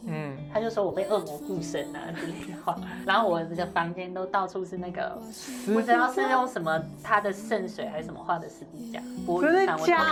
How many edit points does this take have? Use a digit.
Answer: 0